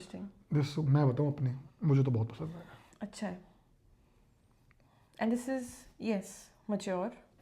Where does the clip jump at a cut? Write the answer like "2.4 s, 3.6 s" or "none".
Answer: none